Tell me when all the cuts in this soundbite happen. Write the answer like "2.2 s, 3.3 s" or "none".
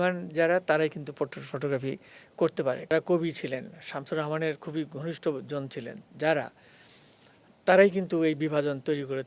2.9 s